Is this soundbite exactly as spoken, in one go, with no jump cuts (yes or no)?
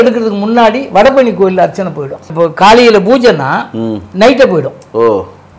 no